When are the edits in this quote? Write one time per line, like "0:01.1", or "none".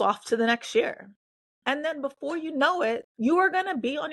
0:03.1